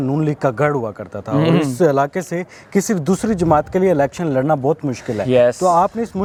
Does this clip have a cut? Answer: no; 0 cuts

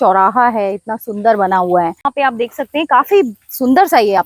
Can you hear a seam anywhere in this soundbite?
yes; 1 cut; at 2.0 s

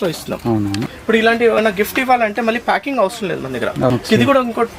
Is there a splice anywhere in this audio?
yes; 2 cuts; at 0.9 s, 3.9 s

